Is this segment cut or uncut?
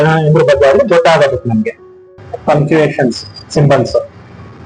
cut